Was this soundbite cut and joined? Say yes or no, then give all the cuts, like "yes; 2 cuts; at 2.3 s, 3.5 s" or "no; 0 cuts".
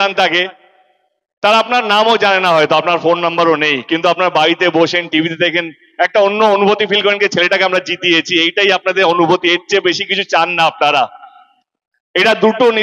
no; 0 cuts